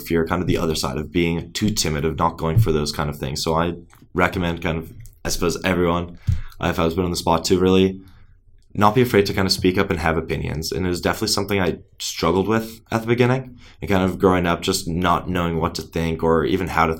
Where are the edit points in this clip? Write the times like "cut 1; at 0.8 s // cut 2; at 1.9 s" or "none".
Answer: none